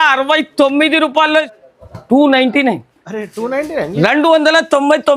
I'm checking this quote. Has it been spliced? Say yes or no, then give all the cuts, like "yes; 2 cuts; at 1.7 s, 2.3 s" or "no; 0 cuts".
yes; 1 cut; at 1.5 s